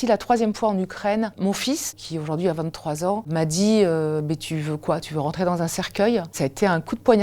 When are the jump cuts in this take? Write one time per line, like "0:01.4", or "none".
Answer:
0:01.9
0:03.3
0:06.3